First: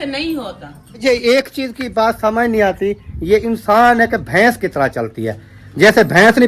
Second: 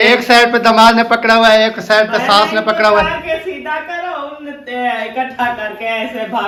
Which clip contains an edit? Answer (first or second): first